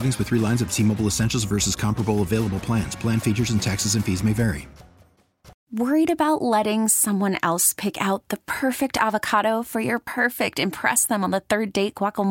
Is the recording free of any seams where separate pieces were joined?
no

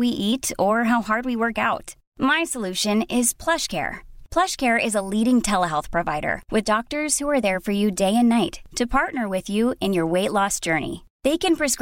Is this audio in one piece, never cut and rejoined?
yes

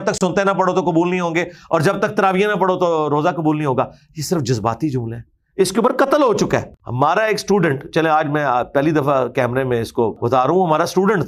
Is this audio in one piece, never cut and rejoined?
no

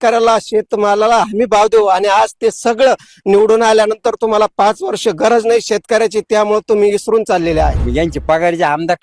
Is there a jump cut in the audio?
yes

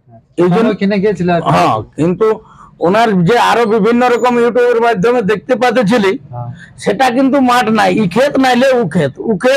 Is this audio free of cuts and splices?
yes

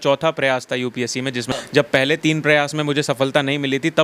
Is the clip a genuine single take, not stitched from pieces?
no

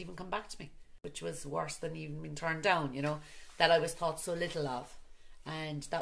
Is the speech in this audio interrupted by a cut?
yes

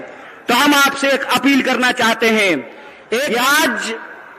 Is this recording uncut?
no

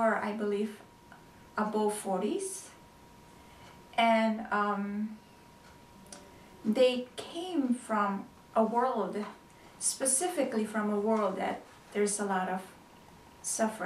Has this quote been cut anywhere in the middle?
no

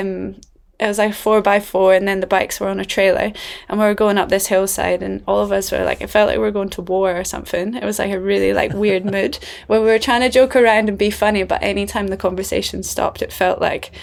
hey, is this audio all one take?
yes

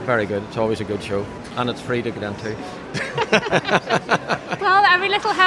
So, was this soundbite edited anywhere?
yes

